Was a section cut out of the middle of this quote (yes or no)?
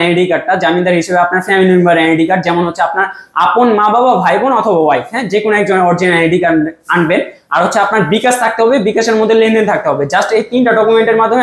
no